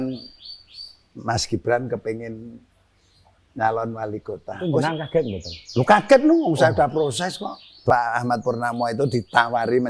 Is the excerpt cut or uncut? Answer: cut